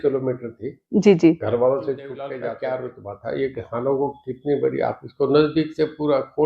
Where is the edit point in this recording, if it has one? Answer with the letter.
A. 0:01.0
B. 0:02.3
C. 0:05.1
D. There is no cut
B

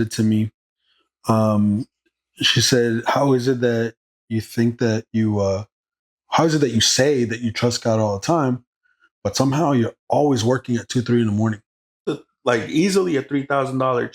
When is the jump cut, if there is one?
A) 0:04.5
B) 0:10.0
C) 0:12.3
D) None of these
C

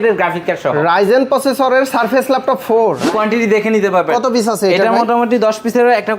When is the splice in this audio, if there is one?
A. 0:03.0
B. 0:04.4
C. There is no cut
A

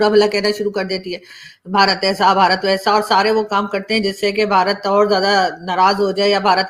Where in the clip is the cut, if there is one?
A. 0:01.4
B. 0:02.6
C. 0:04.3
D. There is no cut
D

